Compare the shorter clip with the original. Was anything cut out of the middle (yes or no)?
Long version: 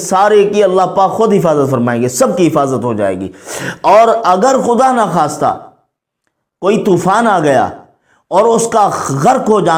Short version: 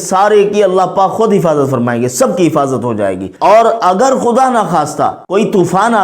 yes